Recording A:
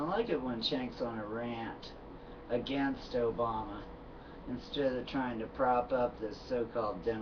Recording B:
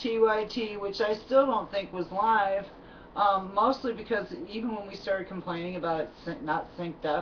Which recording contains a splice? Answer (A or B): A